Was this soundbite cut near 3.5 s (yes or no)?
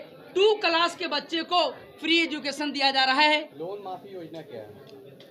yes